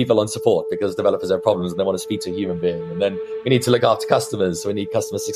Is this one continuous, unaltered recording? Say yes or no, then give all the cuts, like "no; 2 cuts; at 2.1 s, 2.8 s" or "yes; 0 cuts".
yes; 0 cuts